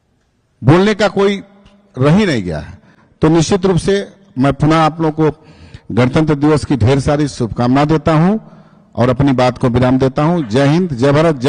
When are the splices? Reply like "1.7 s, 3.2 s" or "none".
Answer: none